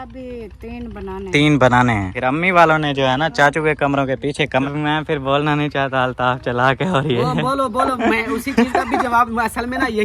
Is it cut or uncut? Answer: cut